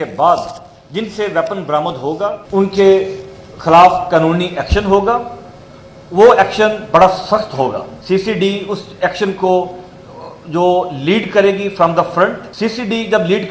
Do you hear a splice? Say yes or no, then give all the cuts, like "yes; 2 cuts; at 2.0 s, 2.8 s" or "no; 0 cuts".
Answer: yes; 3 cuts; at 2.4 s, 7.9 s, 12.5 s